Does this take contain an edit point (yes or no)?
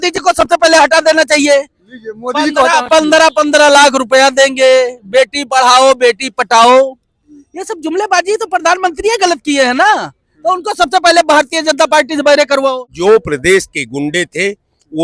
yes